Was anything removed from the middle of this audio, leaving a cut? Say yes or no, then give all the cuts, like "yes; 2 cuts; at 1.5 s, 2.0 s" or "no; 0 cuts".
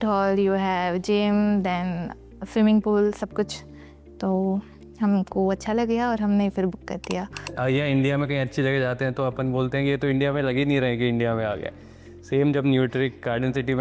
yes; 1 cut; at 7.5 s